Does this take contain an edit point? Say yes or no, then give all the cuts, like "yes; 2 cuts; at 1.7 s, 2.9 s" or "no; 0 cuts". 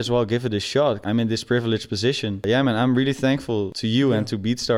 yes; 3 cuts; at 1.0 s, 2.4 s, 3.8 s